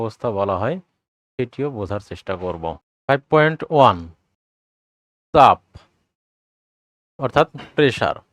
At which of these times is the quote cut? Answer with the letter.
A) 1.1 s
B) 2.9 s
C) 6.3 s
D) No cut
B